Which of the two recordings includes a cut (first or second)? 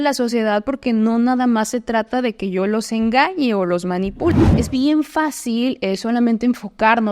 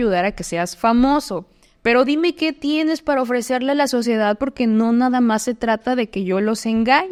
first